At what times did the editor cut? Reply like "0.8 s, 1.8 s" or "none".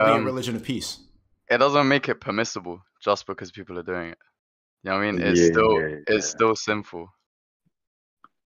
none